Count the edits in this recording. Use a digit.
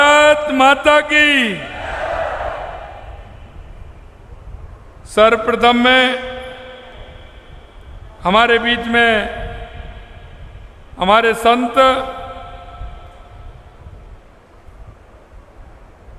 0